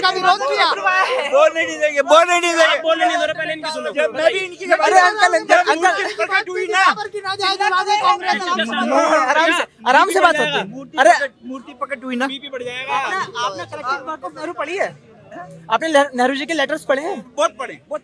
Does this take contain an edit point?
no; 0 cuts

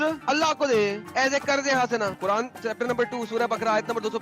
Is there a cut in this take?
yes; 1 cut; at 2.1 s

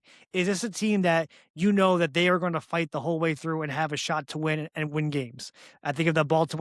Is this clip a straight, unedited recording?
yes; 0 cuts

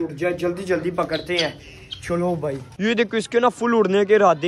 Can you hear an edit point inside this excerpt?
yes; 1 cut; at 2.7 s

